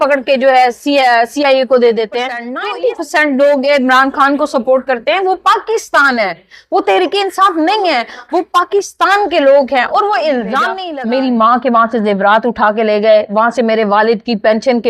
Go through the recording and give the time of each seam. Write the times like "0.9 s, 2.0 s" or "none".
2.5 s, 10.8 s